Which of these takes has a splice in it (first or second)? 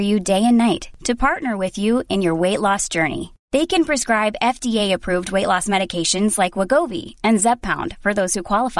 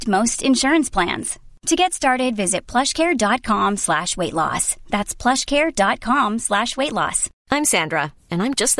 second